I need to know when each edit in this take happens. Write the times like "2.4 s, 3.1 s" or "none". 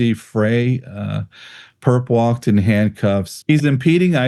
3.3 s